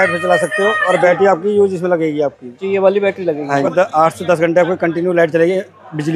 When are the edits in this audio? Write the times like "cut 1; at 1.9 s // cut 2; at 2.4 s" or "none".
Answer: cut 1; at 3.7 s